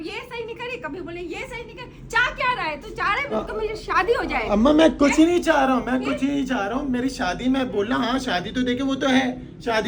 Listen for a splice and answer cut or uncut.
uncut